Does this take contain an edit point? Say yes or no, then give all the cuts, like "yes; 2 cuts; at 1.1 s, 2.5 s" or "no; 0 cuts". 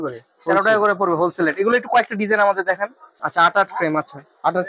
yes; 1 cut; at 3.1 s